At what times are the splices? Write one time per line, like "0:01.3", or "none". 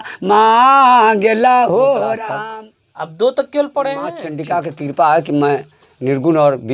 0:02.3
0:04.3